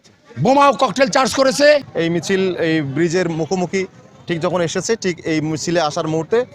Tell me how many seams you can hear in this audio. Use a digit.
1